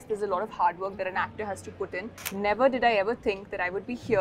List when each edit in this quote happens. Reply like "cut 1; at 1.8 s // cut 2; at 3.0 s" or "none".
cut 1; at 2.2 s